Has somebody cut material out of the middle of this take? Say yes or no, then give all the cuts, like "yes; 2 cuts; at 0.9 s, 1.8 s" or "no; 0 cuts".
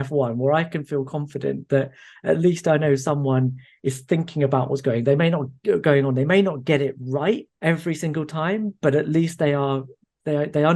yes; 1 cut; at 7.5 s